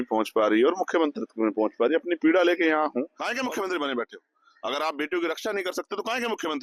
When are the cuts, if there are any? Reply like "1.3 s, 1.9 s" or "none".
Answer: 3.2 s